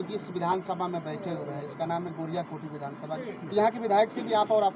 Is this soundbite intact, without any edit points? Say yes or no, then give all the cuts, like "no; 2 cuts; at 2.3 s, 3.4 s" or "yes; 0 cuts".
no; 1 cut; at 3.2 s